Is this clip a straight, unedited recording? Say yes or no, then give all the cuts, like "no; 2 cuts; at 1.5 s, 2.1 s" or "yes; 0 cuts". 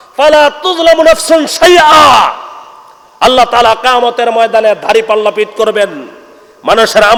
yes; 0 cuts